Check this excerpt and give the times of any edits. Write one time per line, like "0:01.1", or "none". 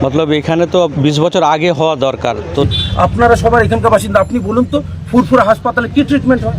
0:02.6